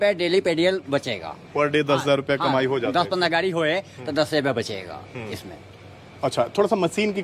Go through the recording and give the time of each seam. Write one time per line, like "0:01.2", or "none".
none